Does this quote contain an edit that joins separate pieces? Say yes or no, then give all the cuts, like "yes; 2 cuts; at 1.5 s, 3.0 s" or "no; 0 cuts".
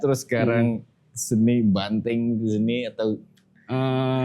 no; 0 cuts